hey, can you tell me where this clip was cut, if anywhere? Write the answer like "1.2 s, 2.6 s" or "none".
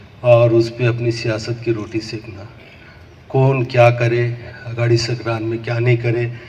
none